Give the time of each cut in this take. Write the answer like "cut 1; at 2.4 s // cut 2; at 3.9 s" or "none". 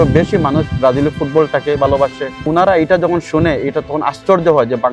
cut 1; at 2.5 s